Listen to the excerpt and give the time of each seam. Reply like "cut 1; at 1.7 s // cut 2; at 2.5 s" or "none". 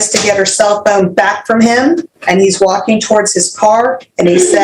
cut 1; at 2.1 s